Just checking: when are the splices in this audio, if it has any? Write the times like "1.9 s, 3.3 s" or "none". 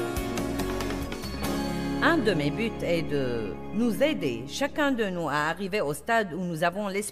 2.0 s